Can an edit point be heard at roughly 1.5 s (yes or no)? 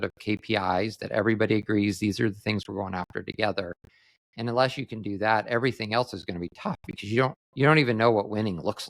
no